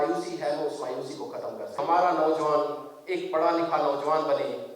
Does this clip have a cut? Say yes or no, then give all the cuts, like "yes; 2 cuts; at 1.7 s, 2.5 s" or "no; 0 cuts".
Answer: yes; 1 cut; at 1.8 s